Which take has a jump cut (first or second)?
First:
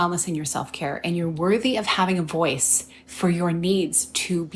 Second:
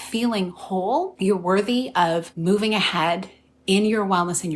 second